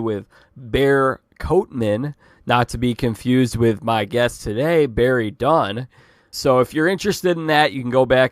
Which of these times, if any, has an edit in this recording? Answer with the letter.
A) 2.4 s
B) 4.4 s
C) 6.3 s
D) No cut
C